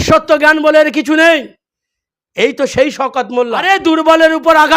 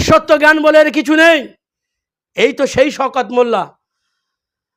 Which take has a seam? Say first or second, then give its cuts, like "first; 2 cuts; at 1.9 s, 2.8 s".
first; 1 cut; at 3.6 s